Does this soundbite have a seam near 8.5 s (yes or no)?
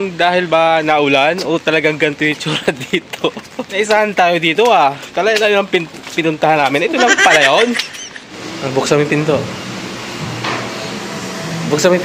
yes